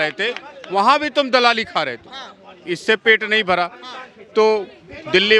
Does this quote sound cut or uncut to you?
uncut